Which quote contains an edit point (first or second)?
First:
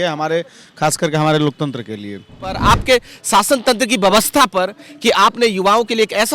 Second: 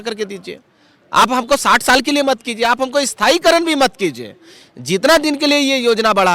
first